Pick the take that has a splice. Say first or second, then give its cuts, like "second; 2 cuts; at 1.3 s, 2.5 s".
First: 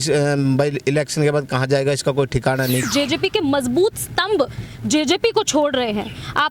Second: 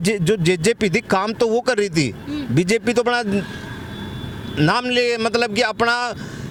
first; 1 cut; at 2.9 s